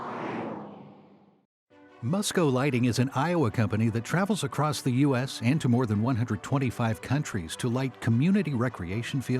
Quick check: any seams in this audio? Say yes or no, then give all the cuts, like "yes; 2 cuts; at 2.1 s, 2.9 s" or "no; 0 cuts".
yes; 1 cut; at 0.9 s